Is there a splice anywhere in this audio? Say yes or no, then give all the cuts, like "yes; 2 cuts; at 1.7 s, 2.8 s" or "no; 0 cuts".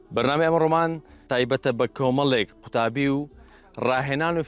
yes; 1 cut; at 1.1 s